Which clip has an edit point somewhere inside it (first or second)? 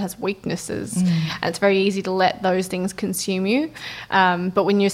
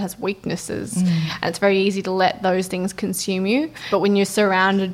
second